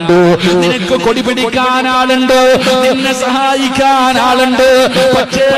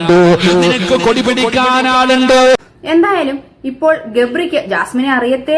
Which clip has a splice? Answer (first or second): second